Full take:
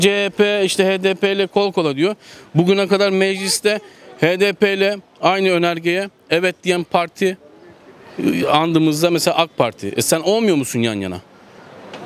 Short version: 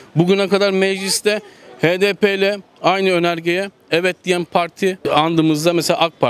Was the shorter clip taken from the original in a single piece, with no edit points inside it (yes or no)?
no